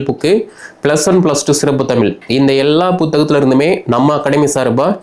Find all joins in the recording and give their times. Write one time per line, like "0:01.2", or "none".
none

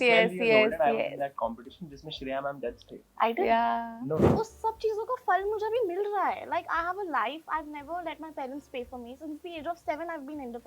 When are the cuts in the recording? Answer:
0:04.3

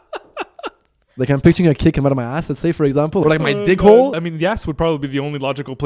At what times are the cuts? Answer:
0:03.2
0:04.2

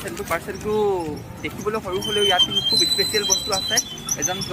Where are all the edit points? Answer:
none

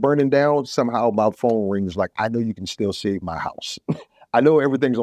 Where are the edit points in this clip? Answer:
none

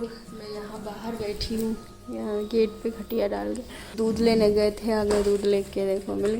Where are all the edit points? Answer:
0:03.8

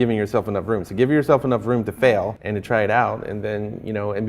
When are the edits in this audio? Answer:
0:02.4

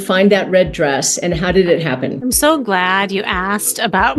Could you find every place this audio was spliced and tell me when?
none

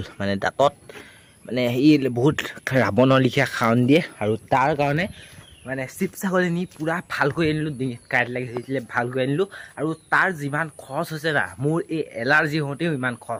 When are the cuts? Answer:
none

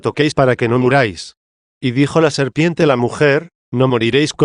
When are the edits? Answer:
0:02.0
0:03.5

